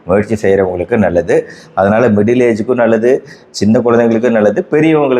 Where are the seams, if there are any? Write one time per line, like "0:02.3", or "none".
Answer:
none